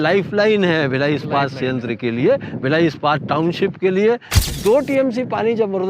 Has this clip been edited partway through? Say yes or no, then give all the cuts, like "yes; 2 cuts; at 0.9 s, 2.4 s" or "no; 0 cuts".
yes; 1 cut; at 4.4 s